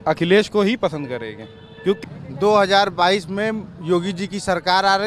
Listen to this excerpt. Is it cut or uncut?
cut